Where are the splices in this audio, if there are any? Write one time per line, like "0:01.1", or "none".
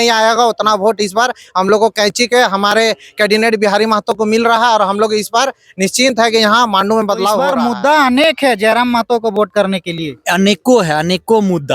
0:07.5